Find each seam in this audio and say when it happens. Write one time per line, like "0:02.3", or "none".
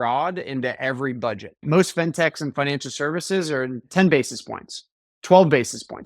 0:01.6
0:03.8

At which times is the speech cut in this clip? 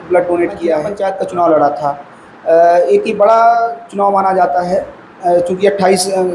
0:00.9

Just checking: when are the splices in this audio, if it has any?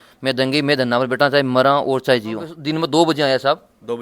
0:02.5

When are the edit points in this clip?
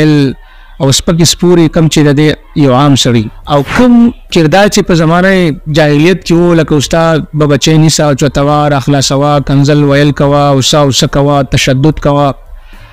0:03.4

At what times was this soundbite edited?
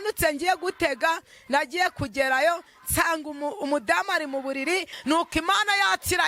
0:04.9

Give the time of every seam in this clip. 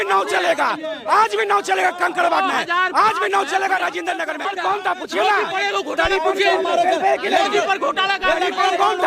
0:04.5

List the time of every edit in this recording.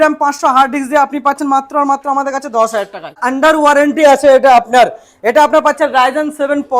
0:03.2

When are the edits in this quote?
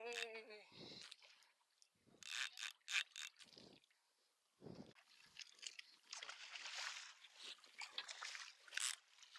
0:05.0

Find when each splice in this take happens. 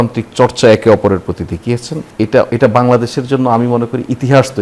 0:02.3

